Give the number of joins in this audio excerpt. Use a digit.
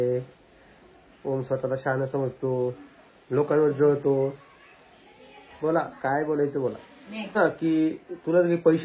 1